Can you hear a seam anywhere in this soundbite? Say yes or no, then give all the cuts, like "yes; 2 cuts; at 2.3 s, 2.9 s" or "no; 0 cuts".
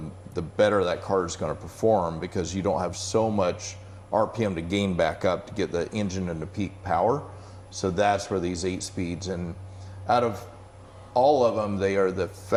no; 0 cuts